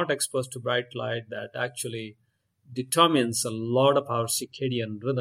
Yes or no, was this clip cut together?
no